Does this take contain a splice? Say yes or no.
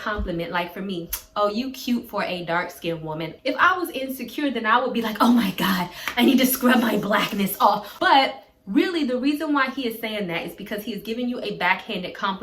yes